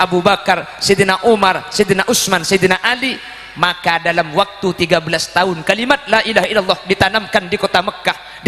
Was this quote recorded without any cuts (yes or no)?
yes